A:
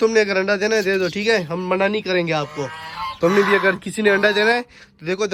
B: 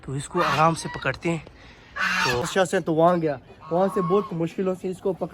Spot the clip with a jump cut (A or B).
B